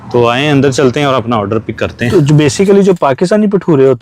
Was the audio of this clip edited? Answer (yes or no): yes